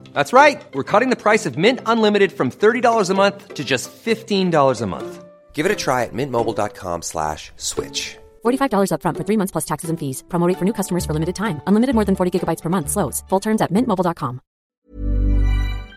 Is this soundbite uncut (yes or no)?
no